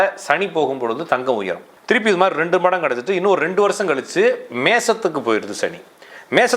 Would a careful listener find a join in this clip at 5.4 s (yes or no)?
no